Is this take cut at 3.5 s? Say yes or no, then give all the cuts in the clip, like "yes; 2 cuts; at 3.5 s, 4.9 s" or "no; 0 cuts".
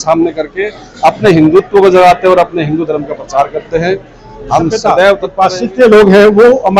no; 1 cut; at 5.3 s